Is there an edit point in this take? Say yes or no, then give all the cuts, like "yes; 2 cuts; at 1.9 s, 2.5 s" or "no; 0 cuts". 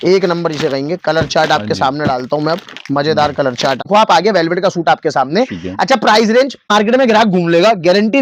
yes; 2 cuts; at 3.9 s, 6.7 s